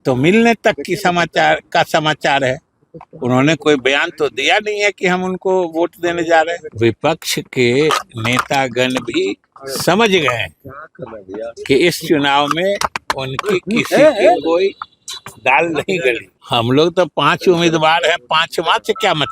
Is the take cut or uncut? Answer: cut